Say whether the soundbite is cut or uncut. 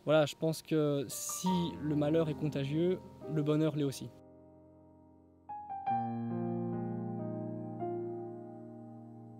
cut